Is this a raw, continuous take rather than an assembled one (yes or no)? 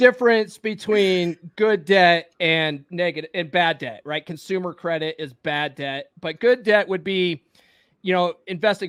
yes